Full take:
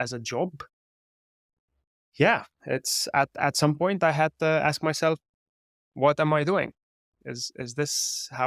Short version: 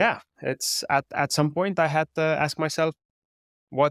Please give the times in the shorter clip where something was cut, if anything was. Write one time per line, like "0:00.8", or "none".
none